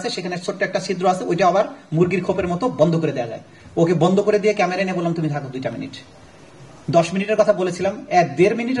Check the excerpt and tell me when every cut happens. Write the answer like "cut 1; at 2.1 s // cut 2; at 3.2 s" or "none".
none